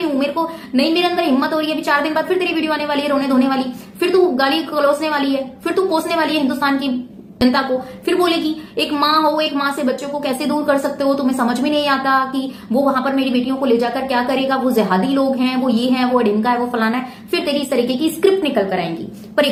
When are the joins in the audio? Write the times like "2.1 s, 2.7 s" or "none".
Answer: none